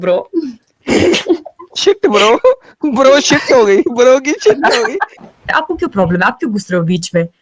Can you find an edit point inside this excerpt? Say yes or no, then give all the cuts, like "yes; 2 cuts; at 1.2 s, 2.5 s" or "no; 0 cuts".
yes; 1 cut; at 5.2 s